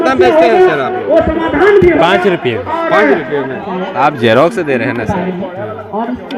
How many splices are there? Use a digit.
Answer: 1